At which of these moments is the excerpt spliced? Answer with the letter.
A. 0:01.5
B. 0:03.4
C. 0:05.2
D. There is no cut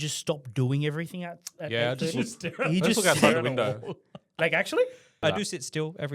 C